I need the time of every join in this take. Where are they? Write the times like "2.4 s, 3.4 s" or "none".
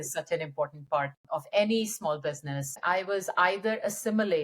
1.2 s, 2.7 s